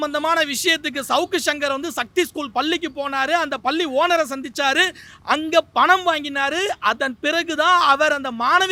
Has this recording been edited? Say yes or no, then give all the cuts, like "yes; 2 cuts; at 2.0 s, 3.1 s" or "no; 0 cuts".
no; 0 cuts